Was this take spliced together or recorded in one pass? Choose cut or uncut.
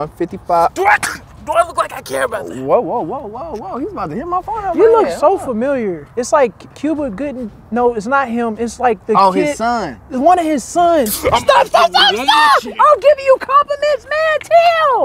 cut